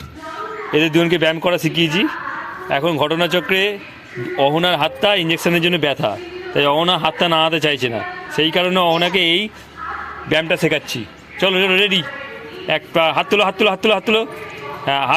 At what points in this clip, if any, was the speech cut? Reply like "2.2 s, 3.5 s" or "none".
none